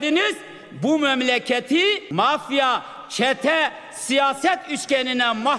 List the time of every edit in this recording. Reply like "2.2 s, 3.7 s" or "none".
2.0 s